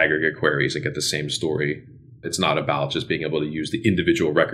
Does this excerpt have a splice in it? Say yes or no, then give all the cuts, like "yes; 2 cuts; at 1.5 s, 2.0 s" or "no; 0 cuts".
no; 0 cuts